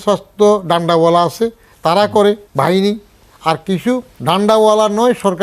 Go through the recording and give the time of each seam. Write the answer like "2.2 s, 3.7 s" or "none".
2.5 s, 4.1 s